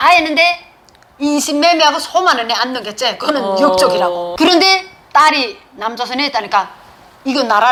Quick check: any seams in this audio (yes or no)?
no